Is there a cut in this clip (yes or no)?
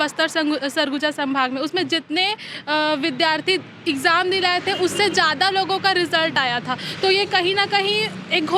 no